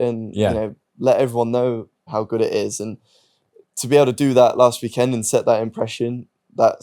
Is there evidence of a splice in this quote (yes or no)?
yes